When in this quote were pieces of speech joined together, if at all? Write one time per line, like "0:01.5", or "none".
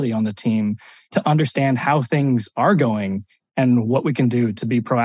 0:01.1